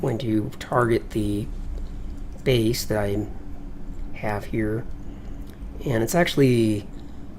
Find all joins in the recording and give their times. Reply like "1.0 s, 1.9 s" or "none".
4.7 s